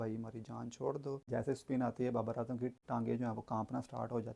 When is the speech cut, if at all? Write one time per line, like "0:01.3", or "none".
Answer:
0:01.3
0:02.8